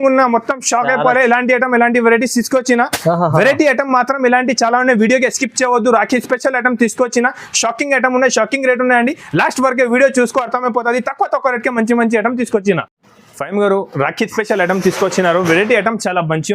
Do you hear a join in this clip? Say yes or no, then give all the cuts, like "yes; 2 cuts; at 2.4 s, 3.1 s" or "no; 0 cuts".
no; 0 cuts